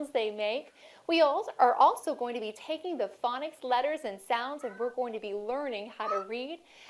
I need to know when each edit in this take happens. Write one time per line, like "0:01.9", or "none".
0:05.1